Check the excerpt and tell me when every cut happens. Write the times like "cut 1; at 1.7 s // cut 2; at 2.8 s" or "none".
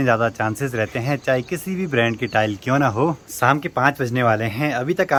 none